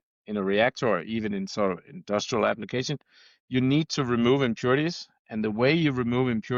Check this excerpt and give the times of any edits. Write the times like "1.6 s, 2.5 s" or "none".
none